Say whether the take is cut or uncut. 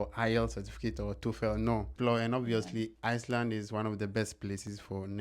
cut